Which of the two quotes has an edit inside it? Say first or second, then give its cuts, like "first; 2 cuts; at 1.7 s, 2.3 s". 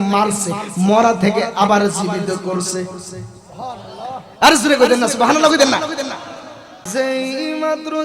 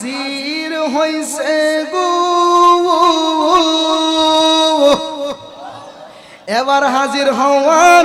first; 1 cut; at 6.7 s